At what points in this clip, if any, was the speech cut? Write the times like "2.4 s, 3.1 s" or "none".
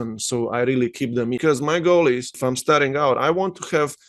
1.4 s, 2.3 s